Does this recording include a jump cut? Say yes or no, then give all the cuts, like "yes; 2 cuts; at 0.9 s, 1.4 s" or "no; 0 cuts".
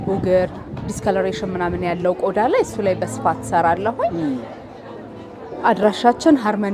no; 0 cuts